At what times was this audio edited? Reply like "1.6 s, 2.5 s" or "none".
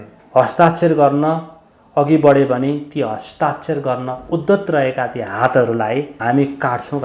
6.1 s